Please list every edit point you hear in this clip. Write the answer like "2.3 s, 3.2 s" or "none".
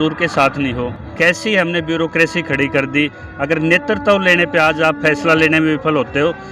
1.0 s